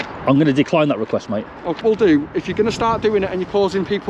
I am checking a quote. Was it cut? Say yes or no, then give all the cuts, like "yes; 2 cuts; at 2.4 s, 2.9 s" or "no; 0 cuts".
yes; 1 cut; at 1.8 s